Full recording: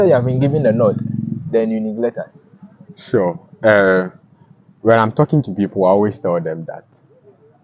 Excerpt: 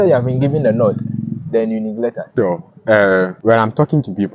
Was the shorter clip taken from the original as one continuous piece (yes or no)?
no